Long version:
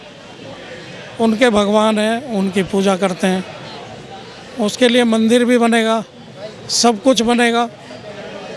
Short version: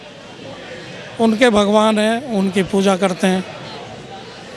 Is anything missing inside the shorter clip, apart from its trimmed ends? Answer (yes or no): no